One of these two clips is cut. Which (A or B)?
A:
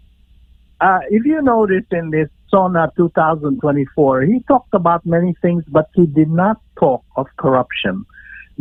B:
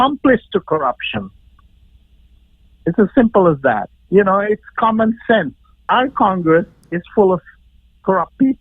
B